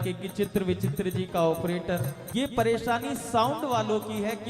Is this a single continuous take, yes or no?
no